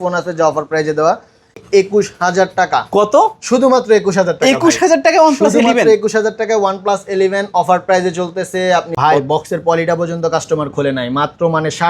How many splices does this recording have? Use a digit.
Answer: 2